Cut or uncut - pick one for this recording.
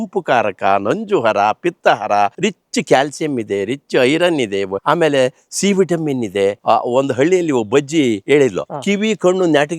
cut